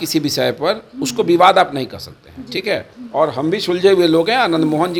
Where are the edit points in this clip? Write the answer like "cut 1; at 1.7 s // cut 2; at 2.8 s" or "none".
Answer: none